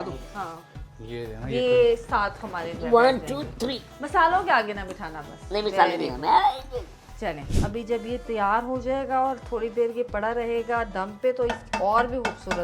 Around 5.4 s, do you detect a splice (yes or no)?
no